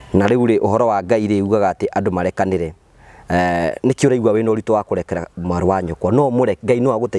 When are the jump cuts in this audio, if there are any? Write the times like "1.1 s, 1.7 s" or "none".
none